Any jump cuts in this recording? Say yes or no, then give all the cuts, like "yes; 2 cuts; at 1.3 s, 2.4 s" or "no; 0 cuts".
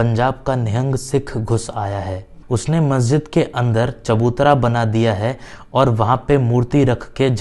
no; 0 cuts